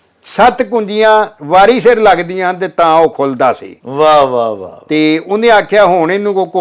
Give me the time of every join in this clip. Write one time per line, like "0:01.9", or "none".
none